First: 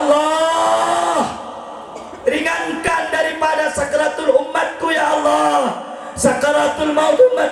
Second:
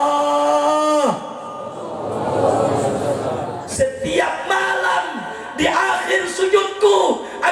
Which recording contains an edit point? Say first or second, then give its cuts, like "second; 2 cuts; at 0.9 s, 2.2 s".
second; 1 cut; at 3.6 s